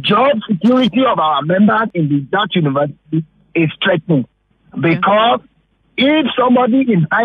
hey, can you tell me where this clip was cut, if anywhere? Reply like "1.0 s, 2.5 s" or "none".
1.9 s